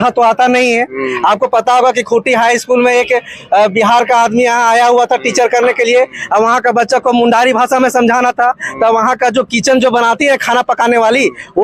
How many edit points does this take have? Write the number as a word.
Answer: zero